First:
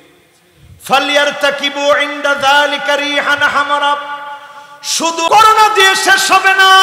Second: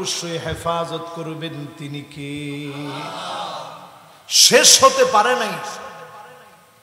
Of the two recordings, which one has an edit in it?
first; 1 cut; at 5.3 s

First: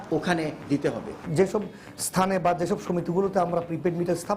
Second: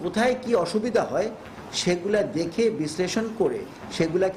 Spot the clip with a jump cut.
first; 1 cut; at 1.2 s

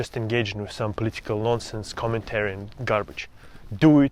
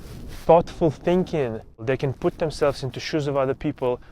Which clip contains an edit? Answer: second; 1 cut; at 1.8 s

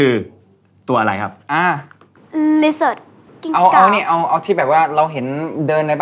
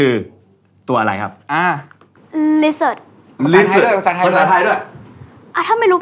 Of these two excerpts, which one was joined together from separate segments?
first; 1 cut; at 3.3 s

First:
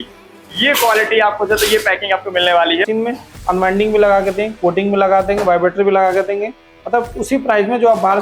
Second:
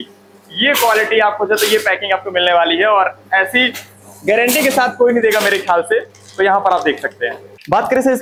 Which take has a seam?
first; 1 cut; at 2.8 s

